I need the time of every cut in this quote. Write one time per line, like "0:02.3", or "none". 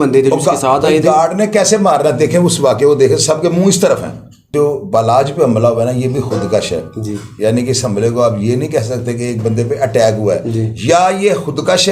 0:04.5